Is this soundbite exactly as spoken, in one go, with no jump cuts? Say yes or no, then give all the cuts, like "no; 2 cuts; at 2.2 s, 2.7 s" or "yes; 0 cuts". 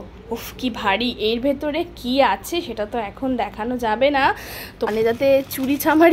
no; 1 cut; at 4.9 s